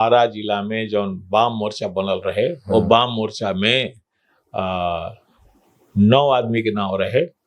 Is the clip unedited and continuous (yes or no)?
yes